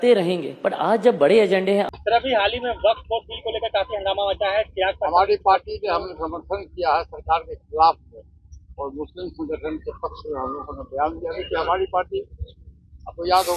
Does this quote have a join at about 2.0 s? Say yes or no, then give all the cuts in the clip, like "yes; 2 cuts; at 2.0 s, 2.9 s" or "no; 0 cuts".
yes; 1 cut; at 2.0 s